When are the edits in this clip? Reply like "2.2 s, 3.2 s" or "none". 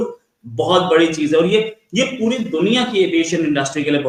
none